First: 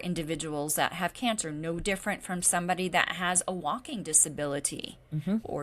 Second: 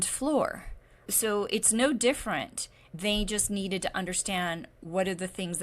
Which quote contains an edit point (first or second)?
second